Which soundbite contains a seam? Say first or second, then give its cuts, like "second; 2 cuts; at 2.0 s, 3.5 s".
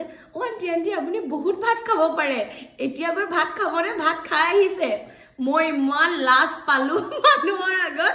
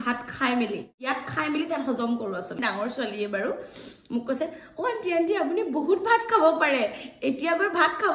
second; 2 cuts; at 0.9 s, 2.5 s